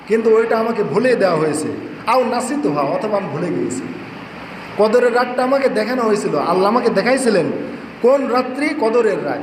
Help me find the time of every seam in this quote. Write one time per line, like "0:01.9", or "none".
none